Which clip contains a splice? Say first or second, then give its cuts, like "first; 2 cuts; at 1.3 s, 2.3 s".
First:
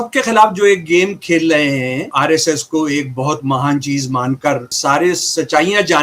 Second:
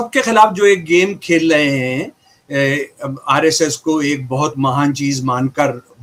first; 2 cuts; at 2.1 s, 4.7 s